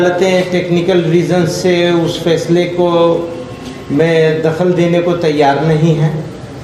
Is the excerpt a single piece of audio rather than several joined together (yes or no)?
yes